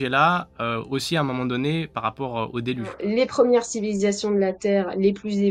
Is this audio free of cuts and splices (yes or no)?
no